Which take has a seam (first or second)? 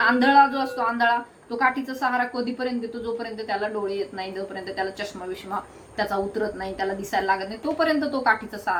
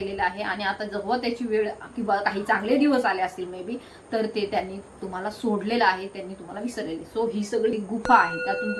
second